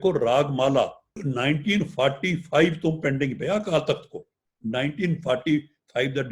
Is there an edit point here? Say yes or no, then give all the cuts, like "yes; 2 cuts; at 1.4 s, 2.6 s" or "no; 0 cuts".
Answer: yes; 1 cut; at 1.1 s